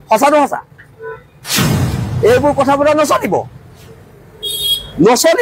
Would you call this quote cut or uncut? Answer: cut